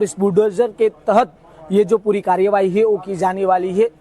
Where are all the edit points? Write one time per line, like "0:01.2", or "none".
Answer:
0:02.4